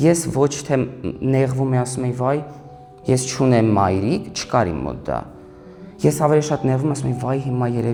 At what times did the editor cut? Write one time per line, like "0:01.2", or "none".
none